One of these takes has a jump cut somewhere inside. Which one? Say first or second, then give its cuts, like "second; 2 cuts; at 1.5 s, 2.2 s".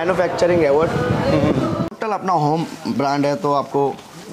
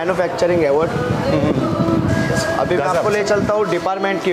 first; 1 cut; at 1.9 s